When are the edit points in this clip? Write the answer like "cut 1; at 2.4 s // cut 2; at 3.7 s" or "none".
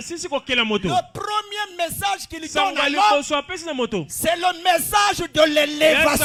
none

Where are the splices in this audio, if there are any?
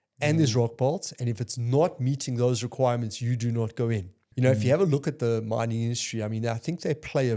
cut 1; at 4.2 s

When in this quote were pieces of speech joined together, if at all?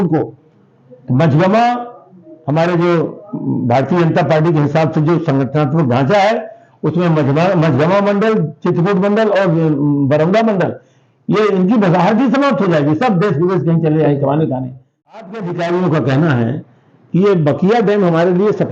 cut 1; at 15.2 s

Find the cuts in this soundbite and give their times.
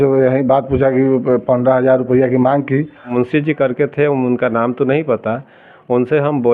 cut 1; at 3.1 s

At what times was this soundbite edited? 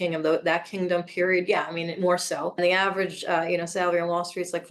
cut 1; at 2.6 s

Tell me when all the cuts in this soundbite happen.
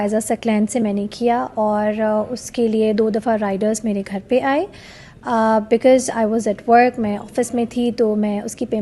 none

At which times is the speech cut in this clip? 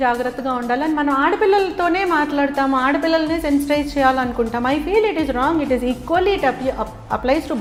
none

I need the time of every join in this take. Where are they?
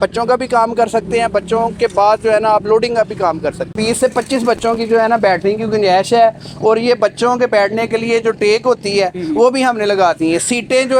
cut 1; at 3.7 s

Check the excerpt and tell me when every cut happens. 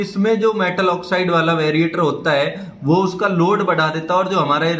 none

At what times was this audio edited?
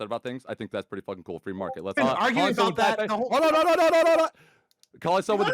cut 1; at 2.0 s

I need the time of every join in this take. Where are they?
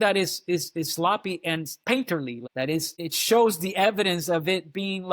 cut 1; at 1.7 s // cut 2; at 2.5 s

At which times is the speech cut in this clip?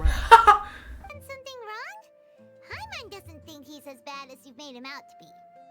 cut 1; at 1.1 s

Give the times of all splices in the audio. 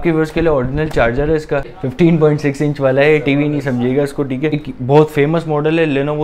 cut 1; at 1.8 s // cut 2; at 4.5 s

